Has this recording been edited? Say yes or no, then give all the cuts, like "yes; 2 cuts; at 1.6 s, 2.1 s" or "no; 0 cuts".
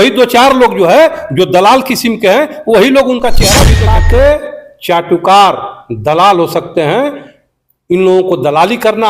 yes; 1 cut; at 3.7 s